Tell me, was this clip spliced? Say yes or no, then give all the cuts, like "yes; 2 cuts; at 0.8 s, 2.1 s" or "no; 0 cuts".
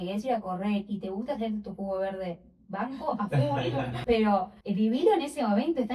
yes; 2 cuts; at 3.9 s, 4.6 s